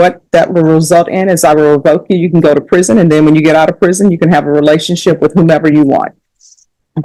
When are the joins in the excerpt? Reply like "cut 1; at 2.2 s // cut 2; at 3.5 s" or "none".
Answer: none